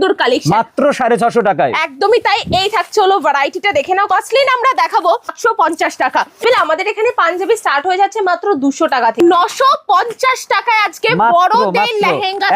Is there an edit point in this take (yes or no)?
yes